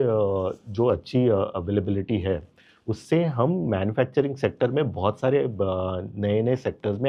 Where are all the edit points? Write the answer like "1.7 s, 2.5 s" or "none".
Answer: none